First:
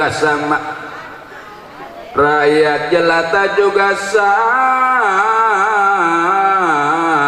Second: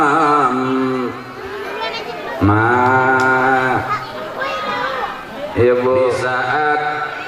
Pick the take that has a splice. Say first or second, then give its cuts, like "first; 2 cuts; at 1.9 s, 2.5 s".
second; 1 cut; at 6.2 s